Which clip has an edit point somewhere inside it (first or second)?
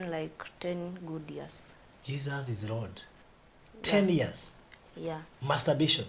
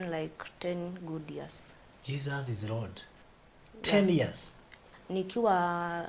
second